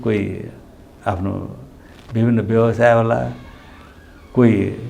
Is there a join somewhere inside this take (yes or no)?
no